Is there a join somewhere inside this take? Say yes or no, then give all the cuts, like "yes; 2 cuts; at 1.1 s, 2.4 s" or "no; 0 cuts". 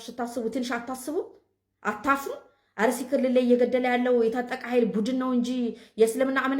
no; 0 cuts